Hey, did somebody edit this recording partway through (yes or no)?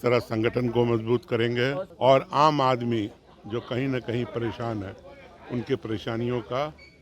yes